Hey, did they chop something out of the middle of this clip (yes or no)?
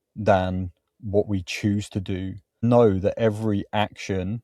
yes